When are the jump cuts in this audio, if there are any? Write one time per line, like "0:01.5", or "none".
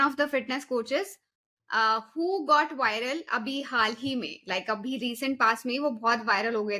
none